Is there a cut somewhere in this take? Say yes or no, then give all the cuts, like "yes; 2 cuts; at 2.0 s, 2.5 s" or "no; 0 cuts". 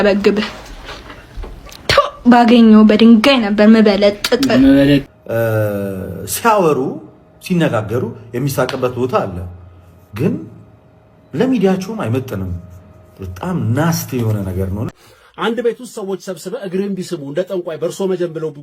yes; 2 cuts; at 5.2 s, 14.9 s